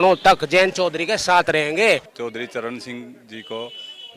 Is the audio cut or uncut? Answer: cut